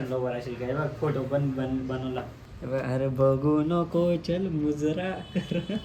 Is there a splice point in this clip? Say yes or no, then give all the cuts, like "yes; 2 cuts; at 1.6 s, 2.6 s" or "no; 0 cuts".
no; 0 cuts